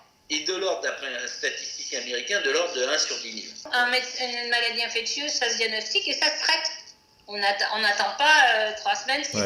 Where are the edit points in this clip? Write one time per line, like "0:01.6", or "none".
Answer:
0:03.7